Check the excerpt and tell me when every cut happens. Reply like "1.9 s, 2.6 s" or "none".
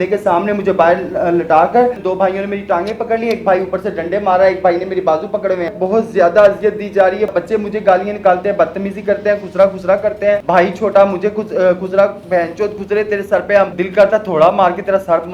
2.0 s, 5.8 s, 7.3 s, 10.4 s, 13.8 s